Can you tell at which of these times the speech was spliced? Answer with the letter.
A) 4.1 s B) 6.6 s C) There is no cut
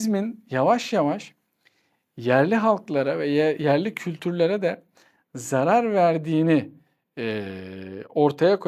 C